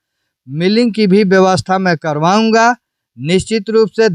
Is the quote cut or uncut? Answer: uncut